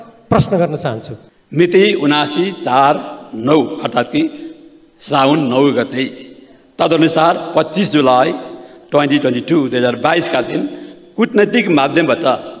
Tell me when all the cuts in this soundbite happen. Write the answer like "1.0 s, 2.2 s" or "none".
1.1 s